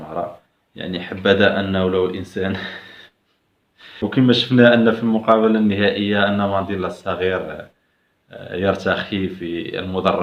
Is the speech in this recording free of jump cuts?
no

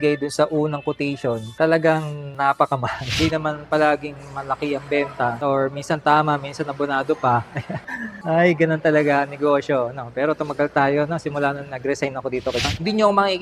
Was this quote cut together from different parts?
yes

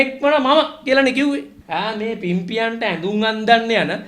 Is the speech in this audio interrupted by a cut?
yes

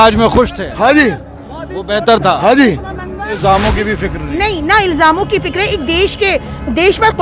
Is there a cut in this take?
yes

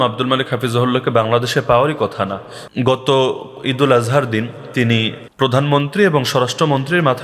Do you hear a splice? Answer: yes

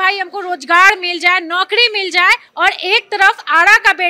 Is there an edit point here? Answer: yes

